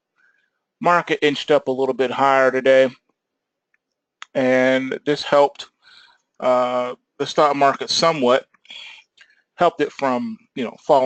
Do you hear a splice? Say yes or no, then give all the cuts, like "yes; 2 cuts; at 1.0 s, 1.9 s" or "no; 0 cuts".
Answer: yes; 1 cut; at 5.9 s